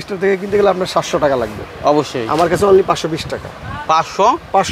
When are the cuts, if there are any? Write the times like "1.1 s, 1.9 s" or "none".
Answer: none